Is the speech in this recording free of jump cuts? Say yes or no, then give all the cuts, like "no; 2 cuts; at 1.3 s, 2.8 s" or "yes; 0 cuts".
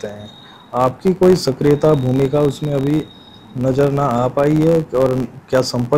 yes; 0 cuts